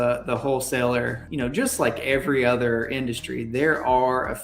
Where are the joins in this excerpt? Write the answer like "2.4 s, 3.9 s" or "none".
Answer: 1.2 s